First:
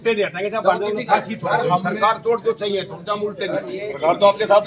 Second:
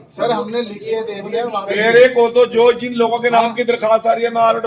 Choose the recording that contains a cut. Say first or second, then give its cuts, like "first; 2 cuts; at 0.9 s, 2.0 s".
second; 1 cut; at 1.7 s